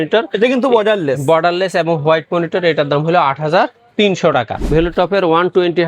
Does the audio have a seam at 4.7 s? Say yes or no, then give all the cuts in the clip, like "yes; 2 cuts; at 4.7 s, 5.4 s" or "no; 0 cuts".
yes; 1 cut; at 4.7 s